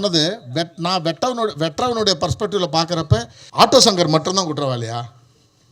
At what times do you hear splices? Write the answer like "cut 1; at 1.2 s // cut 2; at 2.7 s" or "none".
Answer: cut 1; at 3.4 s